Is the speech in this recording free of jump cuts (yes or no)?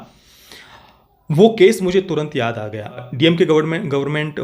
no